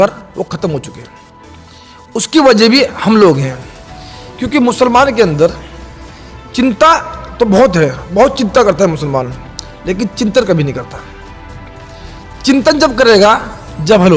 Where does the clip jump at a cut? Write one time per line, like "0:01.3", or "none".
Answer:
none